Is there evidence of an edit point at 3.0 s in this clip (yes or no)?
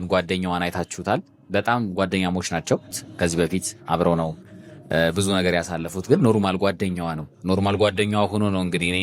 yes